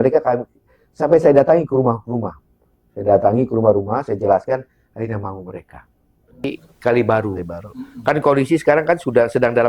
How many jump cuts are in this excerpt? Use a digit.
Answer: 1